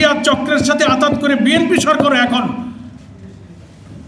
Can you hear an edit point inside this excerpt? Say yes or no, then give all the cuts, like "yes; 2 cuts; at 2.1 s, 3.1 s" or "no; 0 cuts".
no; 0 cuts